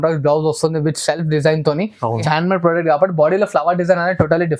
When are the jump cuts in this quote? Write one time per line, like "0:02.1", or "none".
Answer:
0:02.3